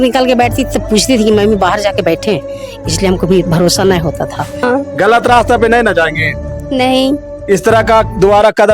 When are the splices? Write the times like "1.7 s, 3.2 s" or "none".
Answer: 4.6 s